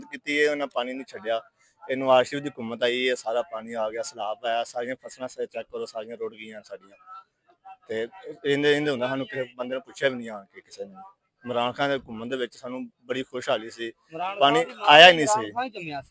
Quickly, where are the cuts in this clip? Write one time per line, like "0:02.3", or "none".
none

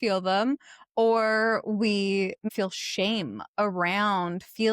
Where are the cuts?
0:02.5

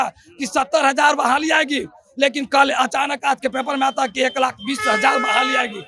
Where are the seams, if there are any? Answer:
none

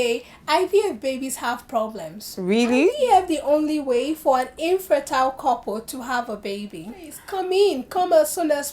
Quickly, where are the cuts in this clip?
0:03.0
0:07.2

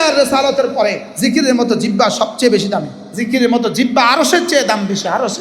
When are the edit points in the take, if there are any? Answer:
0:01.1
0:03.0

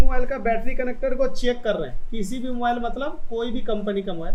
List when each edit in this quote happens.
none

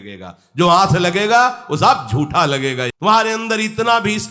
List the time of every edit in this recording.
0:02.9

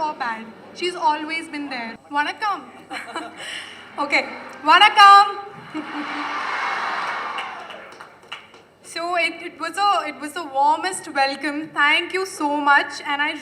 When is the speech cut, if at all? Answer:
0:02.0

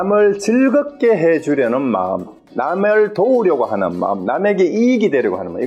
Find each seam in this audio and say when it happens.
none

